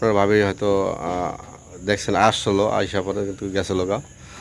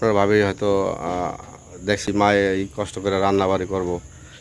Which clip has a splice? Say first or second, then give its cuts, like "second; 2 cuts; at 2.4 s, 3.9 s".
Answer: second; 1 cut; at 2.1 s